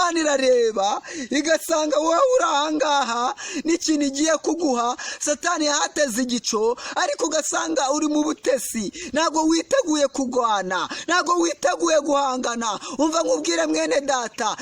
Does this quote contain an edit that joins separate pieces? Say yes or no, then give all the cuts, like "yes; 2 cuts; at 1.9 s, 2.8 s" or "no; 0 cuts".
no; 0 cuts